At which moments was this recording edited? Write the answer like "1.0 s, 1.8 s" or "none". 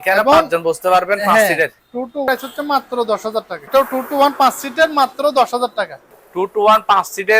2.3 s, 3.6 s, 6.1 s